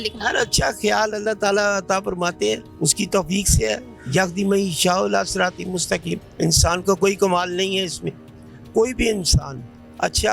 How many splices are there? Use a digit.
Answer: 0